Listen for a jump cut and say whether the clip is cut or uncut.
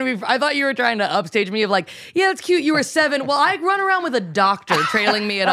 uncut